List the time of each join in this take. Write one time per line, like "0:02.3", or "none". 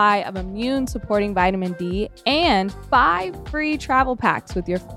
0:02.8